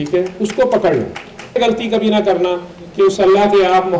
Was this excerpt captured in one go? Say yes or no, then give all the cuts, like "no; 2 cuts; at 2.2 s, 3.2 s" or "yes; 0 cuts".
no; 1 cut; at 1.6 s